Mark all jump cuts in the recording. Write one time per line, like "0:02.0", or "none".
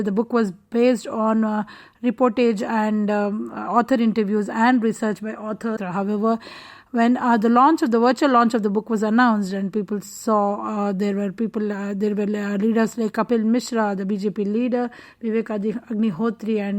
0:05.8